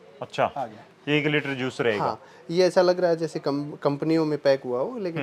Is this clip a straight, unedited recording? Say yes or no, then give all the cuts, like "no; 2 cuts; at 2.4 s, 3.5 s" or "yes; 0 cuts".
yes; 0 cuts